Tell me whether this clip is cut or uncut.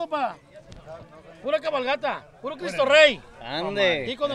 uncut